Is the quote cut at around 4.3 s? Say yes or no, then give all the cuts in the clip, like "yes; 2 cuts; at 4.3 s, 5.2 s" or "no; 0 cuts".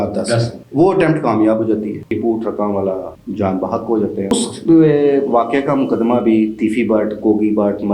yes; 2 cuts; at 2.1 s, 4.3 s